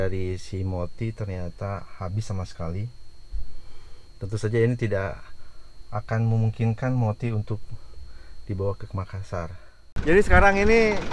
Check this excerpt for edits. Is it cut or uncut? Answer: cut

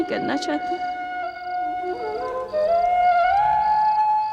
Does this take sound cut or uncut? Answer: cut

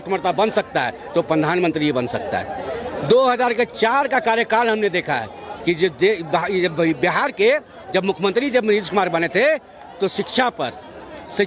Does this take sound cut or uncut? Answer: uncut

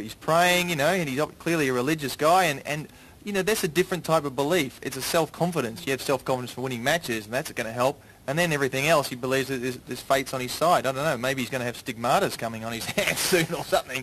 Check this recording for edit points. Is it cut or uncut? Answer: uncut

